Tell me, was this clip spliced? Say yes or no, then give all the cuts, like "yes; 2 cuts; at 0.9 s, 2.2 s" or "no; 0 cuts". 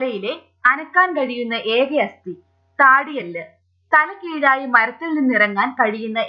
yes; 1 cut; at 1.3 s